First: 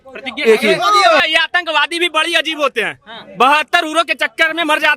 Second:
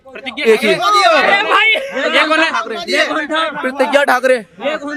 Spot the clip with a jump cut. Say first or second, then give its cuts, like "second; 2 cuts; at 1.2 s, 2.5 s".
first; 1 cut; at 1.2 s